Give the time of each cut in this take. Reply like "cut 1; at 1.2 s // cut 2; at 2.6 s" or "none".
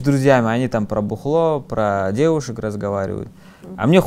none